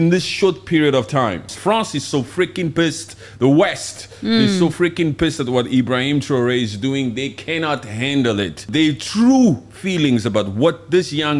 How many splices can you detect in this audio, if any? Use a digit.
2